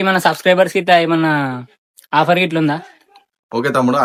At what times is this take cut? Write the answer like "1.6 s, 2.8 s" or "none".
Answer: none